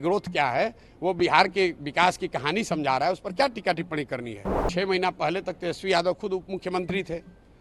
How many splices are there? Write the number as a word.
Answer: one